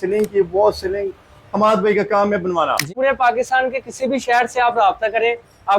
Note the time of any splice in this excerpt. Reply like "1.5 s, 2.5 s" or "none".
2.9 s